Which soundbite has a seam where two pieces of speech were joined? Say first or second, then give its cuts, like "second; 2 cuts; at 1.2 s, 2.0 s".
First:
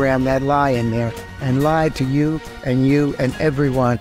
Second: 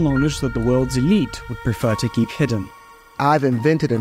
second; 1 cut; at 2.7 s